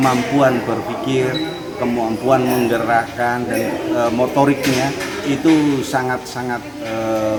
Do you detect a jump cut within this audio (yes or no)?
no